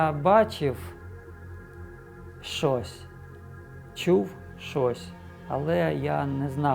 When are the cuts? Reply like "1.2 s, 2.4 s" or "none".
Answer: 0.8 s, 2.4 s